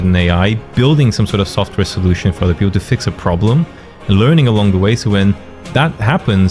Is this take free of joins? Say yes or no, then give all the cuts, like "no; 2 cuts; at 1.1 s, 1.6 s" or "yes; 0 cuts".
yes; 0 cuts